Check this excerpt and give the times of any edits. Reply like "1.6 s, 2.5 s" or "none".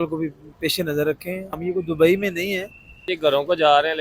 1.5 s, 3.1 s